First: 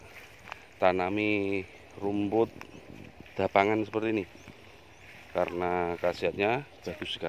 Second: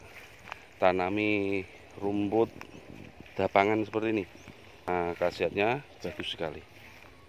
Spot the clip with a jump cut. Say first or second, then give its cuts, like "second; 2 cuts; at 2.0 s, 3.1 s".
second; 1 cut; at 4.9 s